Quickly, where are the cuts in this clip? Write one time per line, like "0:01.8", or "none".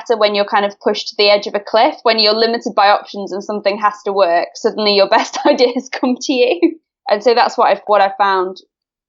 0:07.8